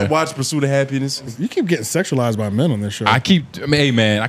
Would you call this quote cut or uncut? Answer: cut